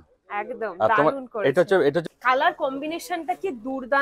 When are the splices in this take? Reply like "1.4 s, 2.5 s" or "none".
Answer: 2.0 s